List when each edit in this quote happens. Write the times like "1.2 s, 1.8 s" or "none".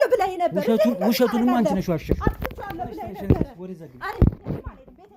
none